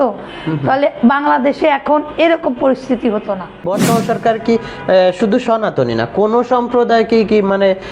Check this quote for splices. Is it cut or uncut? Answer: cut